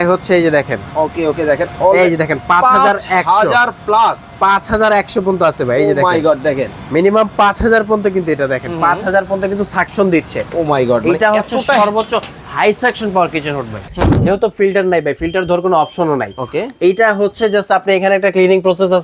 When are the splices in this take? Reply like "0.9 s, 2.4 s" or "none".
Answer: 13.8 s